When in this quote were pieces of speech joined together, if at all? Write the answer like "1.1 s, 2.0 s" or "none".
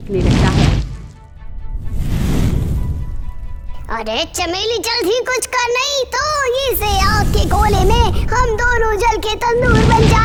none